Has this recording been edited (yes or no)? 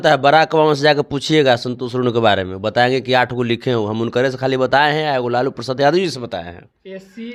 no